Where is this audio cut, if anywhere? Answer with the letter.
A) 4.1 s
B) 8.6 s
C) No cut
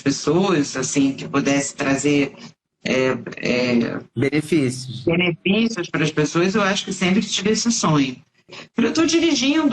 B